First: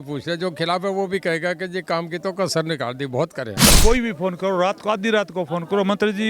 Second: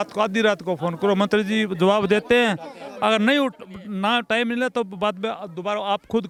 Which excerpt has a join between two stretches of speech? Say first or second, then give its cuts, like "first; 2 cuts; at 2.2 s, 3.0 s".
first; 1 cut; at 3.8 s